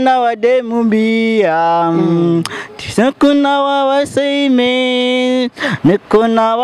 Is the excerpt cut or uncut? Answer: uncut